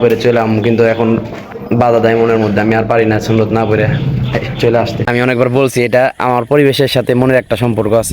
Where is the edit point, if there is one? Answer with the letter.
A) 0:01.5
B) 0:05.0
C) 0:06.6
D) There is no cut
B